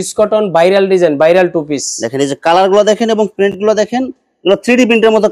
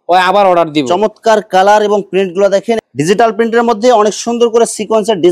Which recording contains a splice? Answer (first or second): second